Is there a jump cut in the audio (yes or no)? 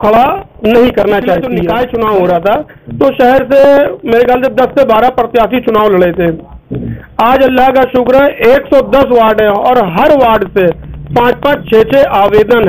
yes